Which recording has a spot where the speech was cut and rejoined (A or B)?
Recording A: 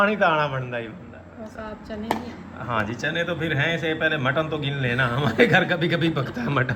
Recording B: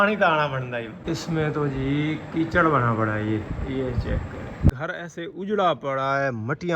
B